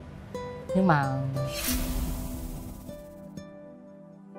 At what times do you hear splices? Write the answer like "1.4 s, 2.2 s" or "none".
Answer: none